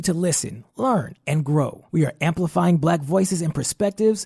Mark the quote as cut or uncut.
uncut